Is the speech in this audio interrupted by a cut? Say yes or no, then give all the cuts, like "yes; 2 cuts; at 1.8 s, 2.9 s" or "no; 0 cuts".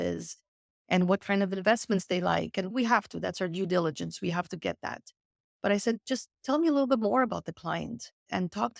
no; 0 cuts